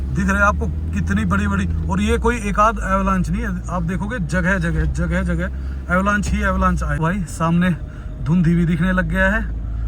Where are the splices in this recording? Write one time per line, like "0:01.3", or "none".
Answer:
0:06.9